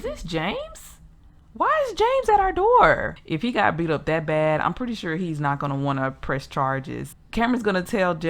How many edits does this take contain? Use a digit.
2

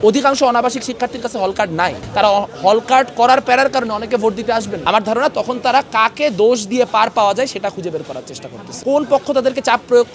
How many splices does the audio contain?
2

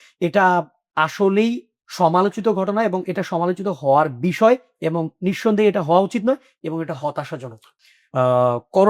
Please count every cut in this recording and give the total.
1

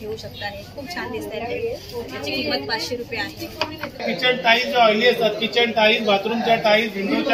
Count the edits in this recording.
1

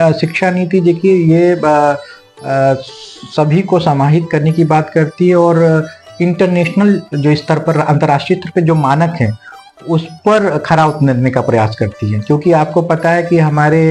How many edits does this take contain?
0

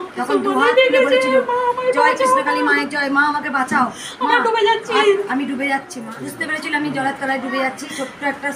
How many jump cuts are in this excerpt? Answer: 1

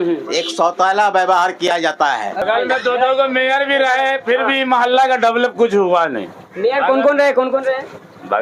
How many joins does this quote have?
1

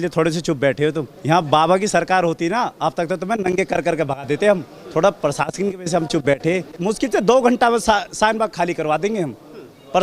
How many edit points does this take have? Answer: 2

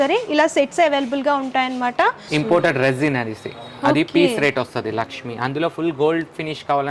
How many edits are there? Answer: 1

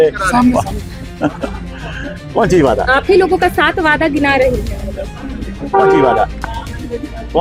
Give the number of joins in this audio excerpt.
0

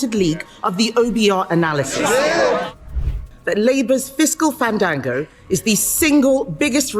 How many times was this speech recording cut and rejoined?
1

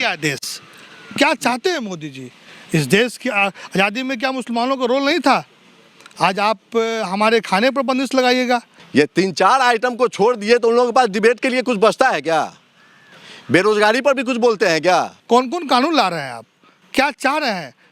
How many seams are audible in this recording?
2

